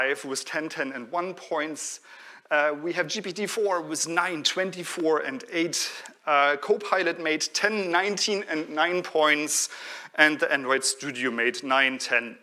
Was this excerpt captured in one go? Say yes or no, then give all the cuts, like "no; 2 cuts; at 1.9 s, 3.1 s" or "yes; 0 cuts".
yes; 0 cuts